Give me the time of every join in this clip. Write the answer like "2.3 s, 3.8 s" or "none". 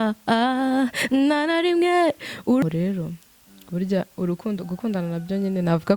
2.6 s